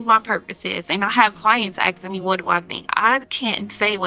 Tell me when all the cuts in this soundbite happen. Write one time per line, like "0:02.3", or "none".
none